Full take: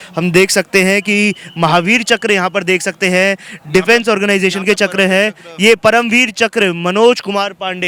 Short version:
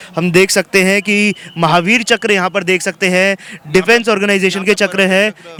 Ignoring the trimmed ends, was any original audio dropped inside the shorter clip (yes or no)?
no